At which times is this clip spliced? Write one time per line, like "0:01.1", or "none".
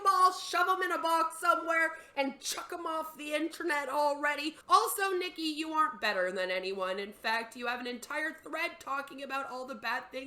0:04.6